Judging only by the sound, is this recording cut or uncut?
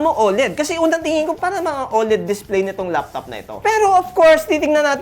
cut